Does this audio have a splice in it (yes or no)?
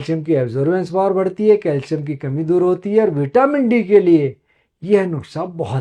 no